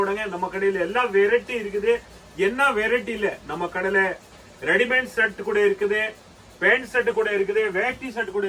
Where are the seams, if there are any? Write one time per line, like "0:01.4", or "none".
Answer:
none